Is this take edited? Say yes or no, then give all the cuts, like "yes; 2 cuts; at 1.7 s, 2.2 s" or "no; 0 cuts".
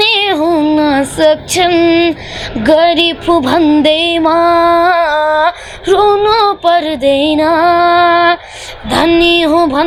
no; 0 cuts